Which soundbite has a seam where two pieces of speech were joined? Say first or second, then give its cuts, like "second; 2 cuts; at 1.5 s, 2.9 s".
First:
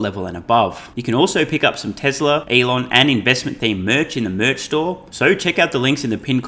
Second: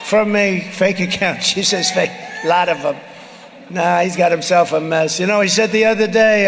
first; 3 cuts; at 0.9 s, 2.5 s, 5.1 s